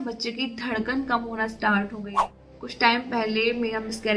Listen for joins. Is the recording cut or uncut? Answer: cut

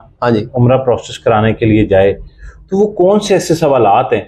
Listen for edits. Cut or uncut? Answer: uncut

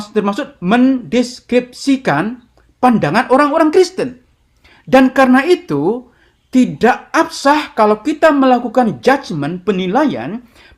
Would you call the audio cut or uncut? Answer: uncut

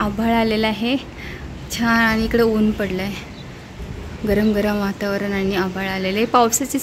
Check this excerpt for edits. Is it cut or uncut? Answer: uncut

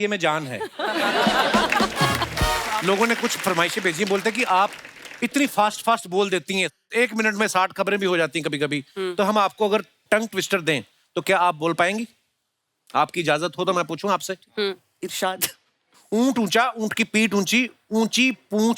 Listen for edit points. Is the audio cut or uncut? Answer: cut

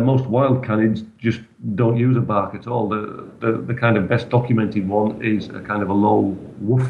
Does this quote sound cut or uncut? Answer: uncut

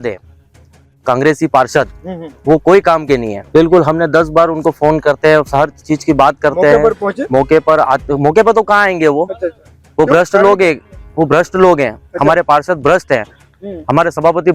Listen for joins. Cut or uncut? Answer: cut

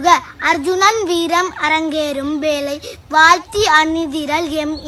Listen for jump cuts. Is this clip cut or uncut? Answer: uncut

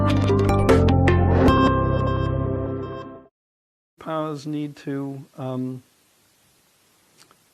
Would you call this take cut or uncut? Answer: cut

